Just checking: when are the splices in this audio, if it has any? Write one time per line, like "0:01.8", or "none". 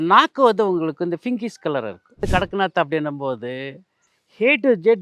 0:02.2